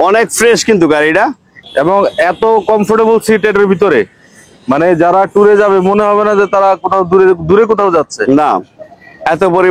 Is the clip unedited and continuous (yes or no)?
no